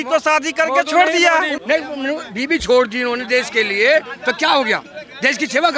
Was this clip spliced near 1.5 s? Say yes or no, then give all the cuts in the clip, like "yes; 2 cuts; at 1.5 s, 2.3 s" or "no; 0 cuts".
yes; 1 cut; at 1.5 s